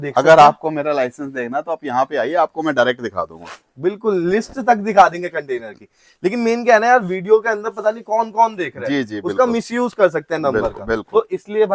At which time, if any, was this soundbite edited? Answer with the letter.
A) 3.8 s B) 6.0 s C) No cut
C